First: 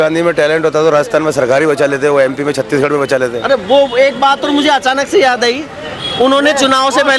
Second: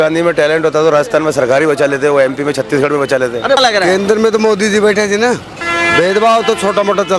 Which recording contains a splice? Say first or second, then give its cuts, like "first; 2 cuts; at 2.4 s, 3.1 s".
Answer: second; 2 cuts; at 3.6 s, 5.5 s